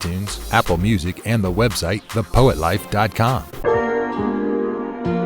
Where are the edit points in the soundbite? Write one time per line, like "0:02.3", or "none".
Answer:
0:03.5